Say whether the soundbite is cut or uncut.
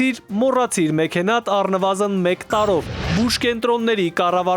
cut